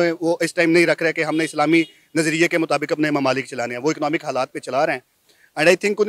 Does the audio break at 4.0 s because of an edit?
no; 0 cuts

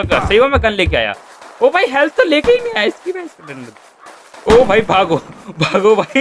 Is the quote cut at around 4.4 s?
no; 0 cuts

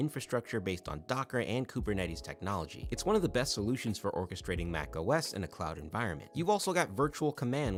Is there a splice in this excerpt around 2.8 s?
no; 0 cuts

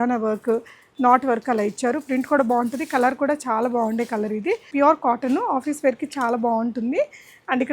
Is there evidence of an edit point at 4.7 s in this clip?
yes; 1 cut; at 4.7 s

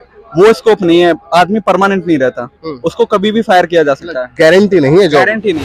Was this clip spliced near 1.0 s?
no; 0 cuts

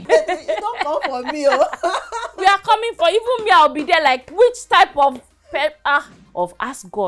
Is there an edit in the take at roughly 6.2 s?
yes; 1 cut; at 6.2 s

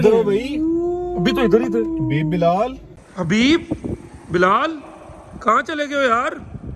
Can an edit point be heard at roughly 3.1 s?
yes; 1 cut; at 3.1 s

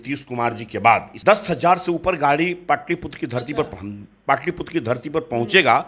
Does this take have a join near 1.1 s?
yes; 1 cut; at 1.1 s

